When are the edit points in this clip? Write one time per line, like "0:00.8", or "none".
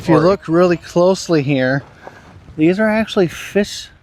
none